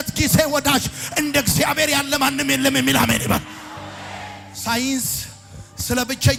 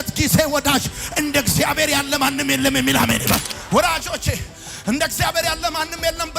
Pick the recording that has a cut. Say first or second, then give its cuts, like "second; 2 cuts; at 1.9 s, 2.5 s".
second; 1 cut; at 3.5 s